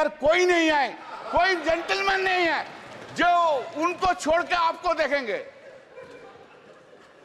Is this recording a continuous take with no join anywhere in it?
yes; 0 cuts

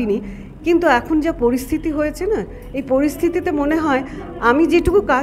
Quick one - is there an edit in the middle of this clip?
no; 0 cuts

